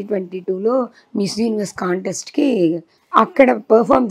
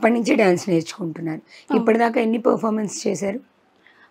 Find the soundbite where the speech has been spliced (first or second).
first